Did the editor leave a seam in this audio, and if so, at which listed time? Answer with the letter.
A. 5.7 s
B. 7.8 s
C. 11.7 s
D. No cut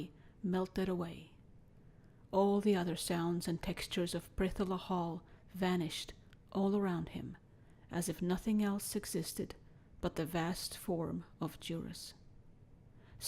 A